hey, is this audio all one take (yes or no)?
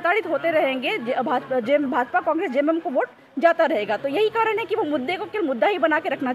yes